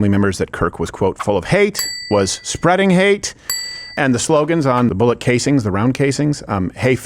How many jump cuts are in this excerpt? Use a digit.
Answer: 2